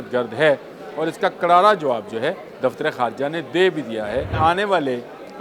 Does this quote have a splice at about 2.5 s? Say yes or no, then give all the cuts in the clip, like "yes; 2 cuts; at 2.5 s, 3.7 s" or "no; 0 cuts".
yes; 2 cuts; at 2.5 s, 4.3 s